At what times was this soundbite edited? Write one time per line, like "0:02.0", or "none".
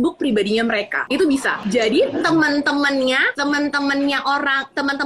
0:01.0
0:01.6
0:03.3